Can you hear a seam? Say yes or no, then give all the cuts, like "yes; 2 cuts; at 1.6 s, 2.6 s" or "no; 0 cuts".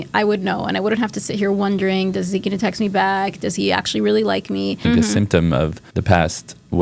yes; 2 cuts; at 4.8 s, 5.8 s